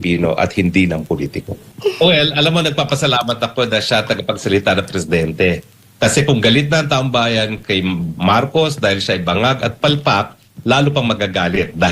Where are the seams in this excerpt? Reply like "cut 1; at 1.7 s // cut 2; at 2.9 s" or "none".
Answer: cut 1; at 1.6 s